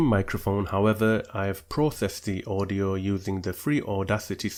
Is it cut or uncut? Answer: uncut